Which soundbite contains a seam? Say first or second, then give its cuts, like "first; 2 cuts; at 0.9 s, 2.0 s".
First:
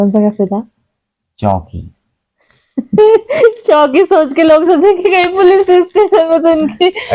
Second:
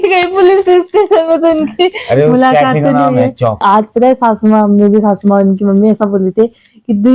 second; 1 cut; at 3.6 s